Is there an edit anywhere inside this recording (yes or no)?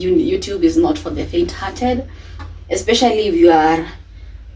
no